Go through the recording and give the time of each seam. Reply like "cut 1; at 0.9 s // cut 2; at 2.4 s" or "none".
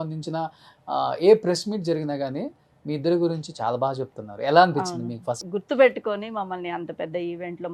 cut 1; at 5.4 s